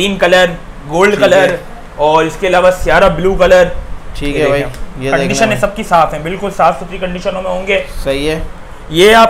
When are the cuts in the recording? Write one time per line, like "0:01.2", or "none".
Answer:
none